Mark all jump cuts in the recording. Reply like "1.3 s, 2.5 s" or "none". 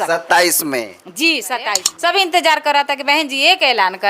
1.8 s